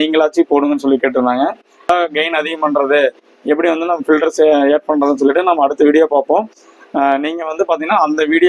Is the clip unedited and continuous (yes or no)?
no